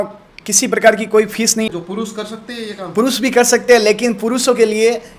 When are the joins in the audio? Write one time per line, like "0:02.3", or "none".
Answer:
0:01.7